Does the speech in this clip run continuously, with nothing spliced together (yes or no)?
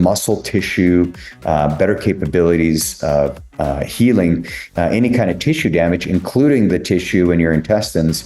yes